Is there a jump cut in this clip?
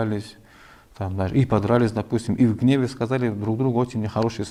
no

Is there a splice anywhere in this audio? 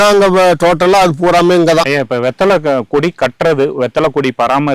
no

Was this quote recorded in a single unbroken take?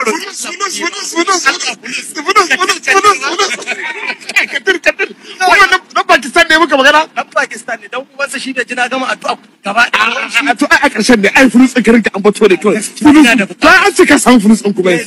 yes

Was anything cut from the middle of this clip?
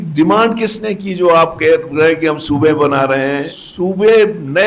yes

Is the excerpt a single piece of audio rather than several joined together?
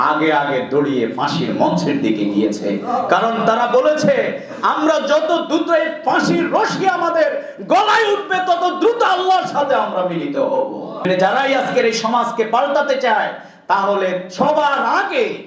no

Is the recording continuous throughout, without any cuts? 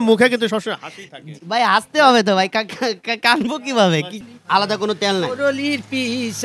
no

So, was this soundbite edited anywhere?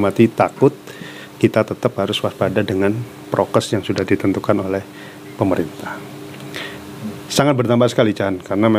no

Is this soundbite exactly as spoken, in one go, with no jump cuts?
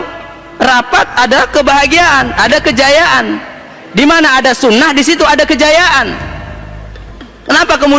yes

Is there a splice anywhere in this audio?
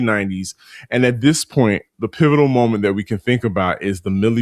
yes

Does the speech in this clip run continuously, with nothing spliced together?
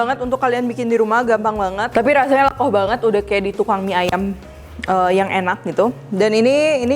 yes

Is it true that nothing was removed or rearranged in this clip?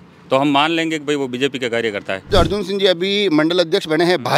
no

